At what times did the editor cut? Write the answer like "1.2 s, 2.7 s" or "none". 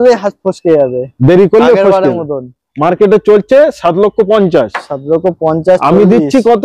none